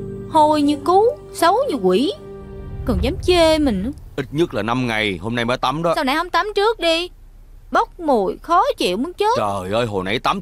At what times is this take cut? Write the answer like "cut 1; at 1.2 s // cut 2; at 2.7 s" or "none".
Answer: none